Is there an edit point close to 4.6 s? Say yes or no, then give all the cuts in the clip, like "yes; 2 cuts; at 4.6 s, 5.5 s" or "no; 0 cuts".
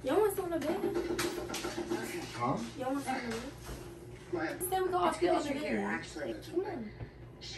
yes; 2 cuts; at 4.6 s, 6.3 s